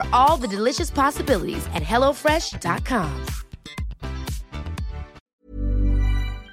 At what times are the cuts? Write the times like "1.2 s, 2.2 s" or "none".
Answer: 5.3 s